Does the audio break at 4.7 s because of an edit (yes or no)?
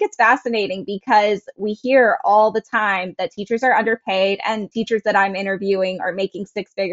yes